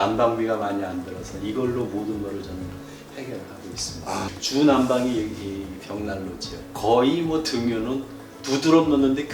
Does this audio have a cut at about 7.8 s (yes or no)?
no